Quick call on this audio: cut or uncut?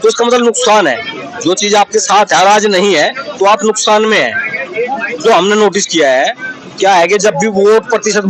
cut